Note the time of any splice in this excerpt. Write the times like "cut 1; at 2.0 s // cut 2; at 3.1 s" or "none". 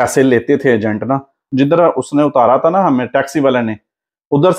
cut 1; at 1.4 s